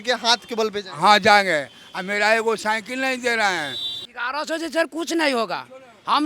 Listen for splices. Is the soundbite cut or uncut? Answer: cut